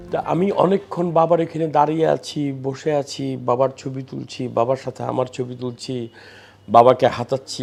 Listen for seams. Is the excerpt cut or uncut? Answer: uncut